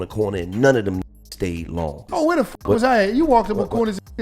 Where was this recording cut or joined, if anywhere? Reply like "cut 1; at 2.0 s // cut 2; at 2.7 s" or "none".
cut 1; at 2.0 s